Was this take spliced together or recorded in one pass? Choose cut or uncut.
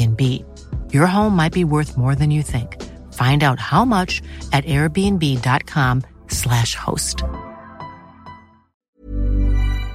cut